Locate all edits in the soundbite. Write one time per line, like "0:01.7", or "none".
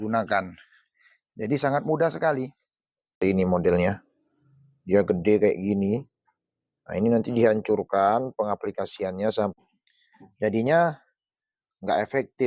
0:03.2
0:09.5